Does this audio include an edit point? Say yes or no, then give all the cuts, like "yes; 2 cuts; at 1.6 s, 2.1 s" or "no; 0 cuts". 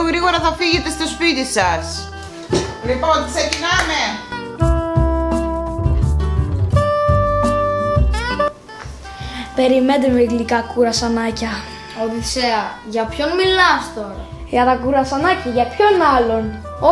no; 0 cuts